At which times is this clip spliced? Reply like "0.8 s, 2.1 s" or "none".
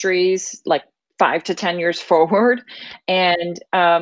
1.0 s